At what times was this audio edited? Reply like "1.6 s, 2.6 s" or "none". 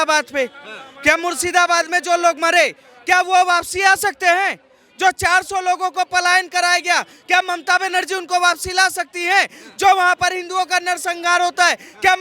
none